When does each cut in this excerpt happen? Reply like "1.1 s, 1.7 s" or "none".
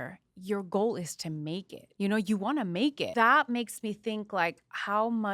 1.8 s, 3.0 s